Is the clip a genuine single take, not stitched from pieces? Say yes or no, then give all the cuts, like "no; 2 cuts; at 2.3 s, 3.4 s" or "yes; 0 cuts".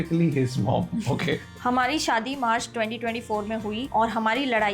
no; 1 cut; at 1.5 s